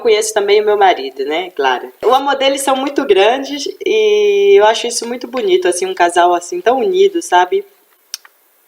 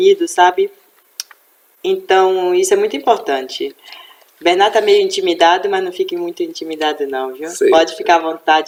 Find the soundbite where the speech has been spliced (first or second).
first